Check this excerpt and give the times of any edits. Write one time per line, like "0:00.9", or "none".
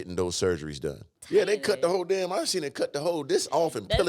0:01.1

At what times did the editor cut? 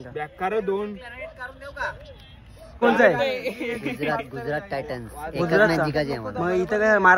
0:02.8

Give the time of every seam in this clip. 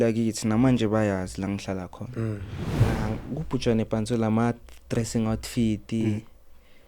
0:02.8

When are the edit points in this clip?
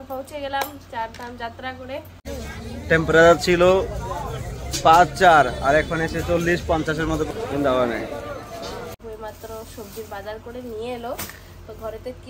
0:02.3
0:08.9

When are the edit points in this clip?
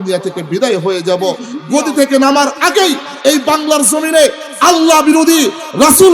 0:01.5

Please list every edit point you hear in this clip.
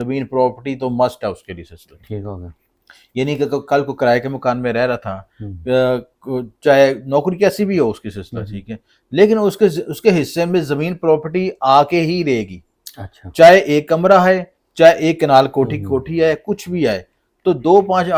none

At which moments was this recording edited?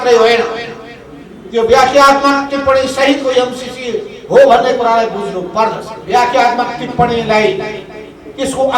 0:05.9

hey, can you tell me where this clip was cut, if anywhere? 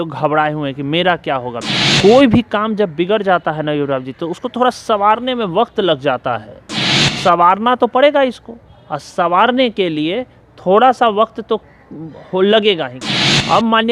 0:01.6
0:06.8
0:13.0

